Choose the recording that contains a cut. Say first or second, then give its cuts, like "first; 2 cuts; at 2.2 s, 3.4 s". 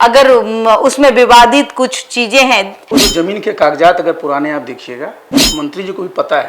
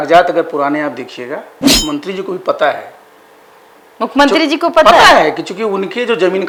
first; 1 cut; at 2.8 s